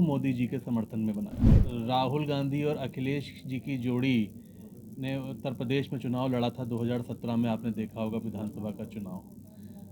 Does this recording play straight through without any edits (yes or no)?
no